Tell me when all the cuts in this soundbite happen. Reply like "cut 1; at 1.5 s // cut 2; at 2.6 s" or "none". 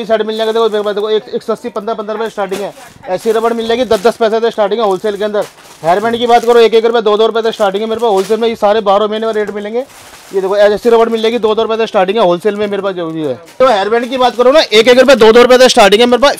none